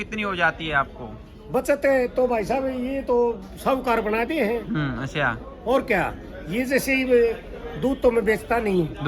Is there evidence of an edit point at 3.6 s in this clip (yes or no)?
no